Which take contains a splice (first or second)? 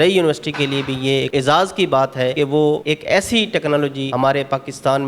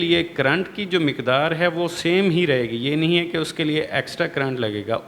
first